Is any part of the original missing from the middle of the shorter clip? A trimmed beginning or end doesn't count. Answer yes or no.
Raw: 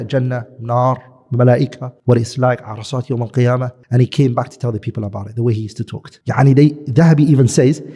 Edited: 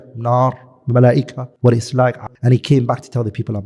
yes